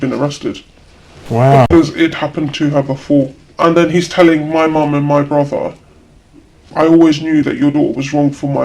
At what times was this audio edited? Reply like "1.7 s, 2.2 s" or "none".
3.4 s